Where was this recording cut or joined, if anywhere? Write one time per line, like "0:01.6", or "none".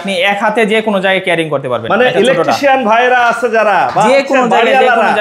none